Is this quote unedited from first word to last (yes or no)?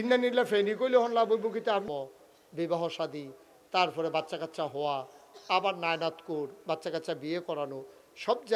no